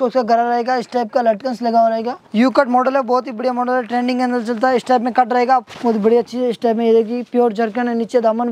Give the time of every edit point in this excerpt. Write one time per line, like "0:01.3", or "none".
0:02.2
0:05.7